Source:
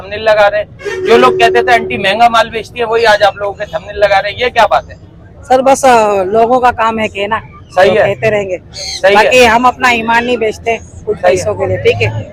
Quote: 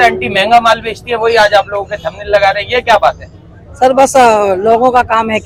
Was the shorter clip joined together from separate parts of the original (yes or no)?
no